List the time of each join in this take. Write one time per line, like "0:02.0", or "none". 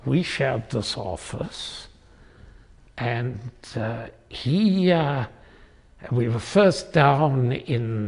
none